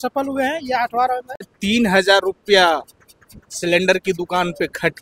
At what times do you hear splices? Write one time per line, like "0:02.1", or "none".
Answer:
0:01.5

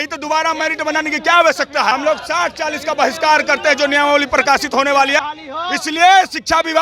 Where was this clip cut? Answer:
0:01.9
0:05.2

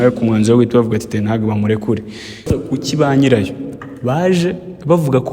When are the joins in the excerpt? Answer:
0:02.5

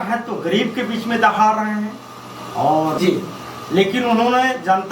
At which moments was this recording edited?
0:03.0

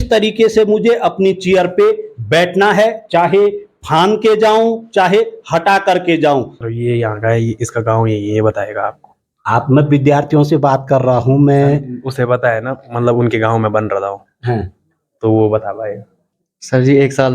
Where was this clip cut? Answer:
0:06.6
0:16.2

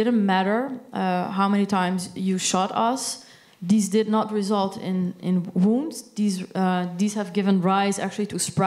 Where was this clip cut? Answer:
none

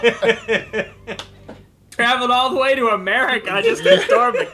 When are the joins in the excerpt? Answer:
0:01.8

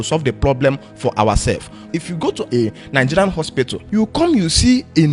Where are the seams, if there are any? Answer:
0:01.9
0:03.8

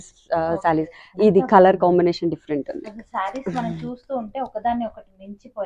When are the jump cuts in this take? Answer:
0:01.0

